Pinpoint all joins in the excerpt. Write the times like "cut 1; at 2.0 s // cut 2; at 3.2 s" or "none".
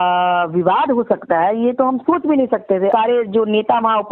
cut 1; at 2.9 s